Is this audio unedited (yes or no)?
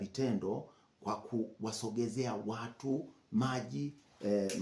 yes